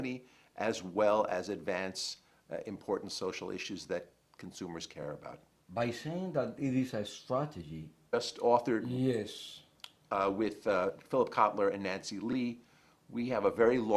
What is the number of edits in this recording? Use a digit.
0